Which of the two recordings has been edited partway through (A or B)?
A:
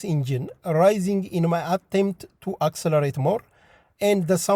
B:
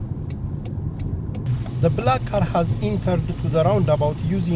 B